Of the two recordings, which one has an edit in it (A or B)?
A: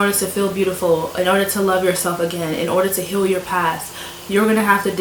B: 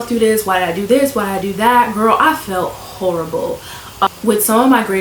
B